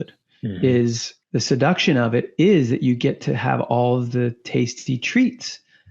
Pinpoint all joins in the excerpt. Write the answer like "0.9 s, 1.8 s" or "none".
1.1 s